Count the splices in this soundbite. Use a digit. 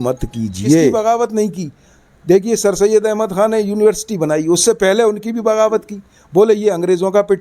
1